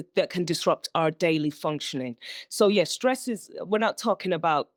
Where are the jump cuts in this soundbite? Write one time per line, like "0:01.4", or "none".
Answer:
none

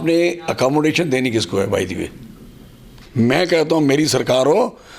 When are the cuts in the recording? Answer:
0:03.0

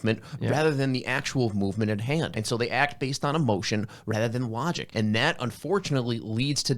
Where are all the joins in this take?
0:02.4
0:04.8

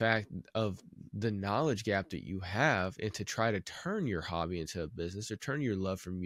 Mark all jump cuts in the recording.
none

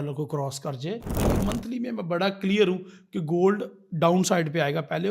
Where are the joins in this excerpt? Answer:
0:01.1

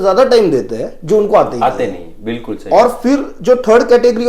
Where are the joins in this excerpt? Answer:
none

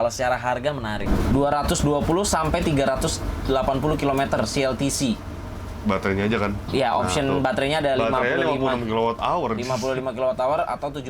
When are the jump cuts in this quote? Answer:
0:01.0

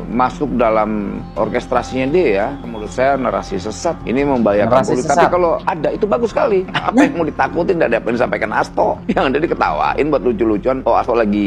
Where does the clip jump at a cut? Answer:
none

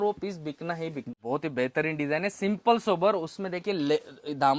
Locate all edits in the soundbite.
0:01.1

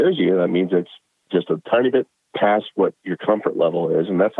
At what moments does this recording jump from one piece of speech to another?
0:01.2

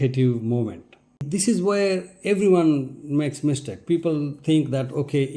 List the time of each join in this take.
0:01.2

